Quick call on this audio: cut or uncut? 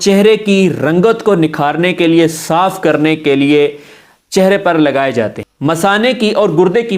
cut